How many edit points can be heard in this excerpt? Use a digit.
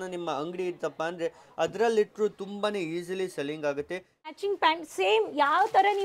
1